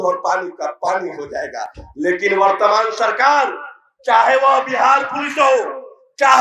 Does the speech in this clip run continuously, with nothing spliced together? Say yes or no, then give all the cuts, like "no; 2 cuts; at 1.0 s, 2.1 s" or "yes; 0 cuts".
yes; 0 cuts